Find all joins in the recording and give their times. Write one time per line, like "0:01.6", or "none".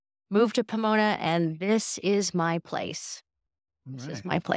none